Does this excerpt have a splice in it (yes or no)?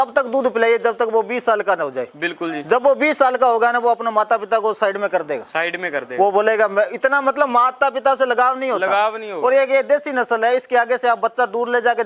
no